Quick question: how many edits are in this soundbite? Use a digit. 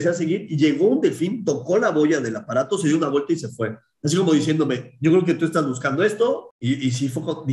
1